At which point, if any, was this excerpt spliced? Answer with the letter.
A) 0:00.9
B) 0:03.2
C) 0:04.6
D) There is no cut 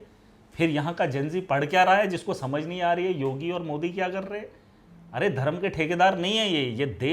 D